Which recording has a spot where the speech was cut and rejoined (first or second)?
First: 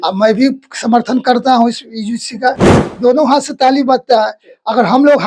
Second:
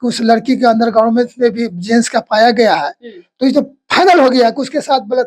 first